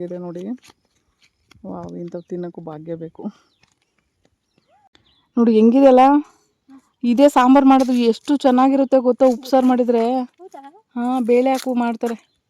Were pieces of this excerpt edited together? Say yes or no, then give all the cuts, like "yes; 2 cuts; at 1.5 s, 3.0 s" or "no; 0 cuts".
yes; 1 cut; at 4.9 s